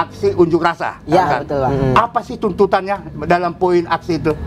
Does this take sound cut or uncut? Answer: cut